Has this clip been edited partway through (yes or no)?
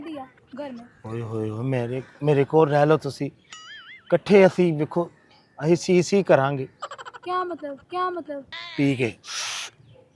no